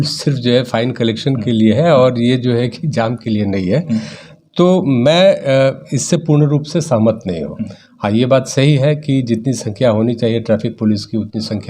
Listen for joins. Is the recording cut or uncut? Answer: uncut